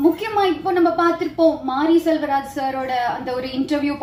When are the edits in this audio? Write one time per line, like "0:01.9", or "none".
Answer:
none

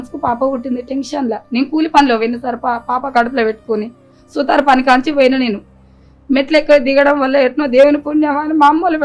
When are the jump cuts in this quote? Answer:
none

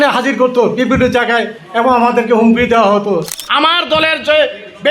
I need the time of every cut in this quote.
0:03.4

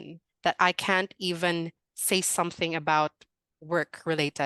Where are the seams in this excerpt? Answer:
none

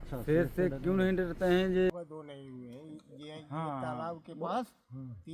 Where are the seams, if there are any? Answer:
0:01.9

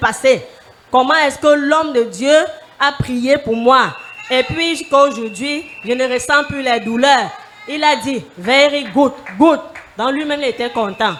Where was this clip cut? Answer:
none

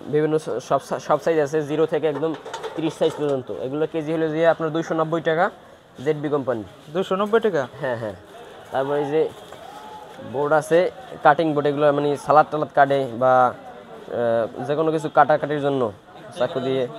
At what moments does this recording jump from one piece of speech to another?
none

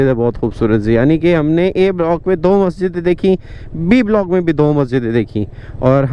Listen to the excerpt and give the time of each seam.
none

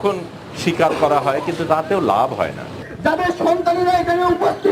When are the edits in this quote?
0:02.8

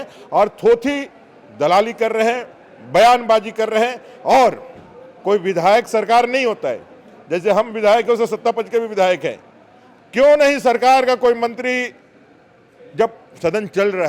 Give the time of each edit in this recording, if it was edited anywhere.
none

